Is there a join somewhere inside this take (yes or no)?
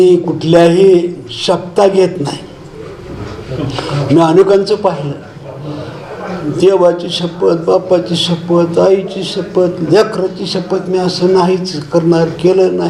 no